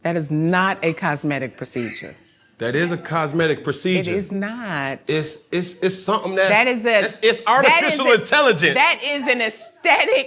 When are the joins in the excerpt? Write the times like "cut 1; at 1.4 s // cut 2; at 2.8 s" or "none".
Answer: none